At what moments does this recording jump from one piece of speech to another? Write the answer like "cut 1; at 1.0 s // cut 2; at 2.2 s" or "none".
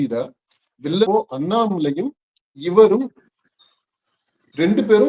cut 1; at 1.0 s